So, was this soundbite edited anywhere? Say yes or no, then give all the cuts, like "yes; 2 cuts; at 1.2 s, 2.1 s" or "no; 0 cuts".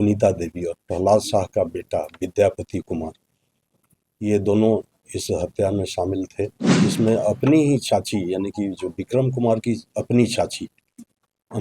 yes; 1 cut; at 6.6 s